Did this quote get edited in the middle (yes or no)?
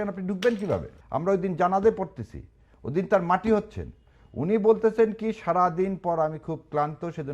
yes